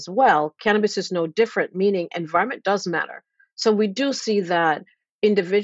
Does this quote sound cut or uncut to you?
uncut